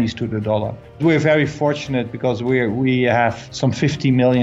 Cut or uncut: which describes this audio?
cut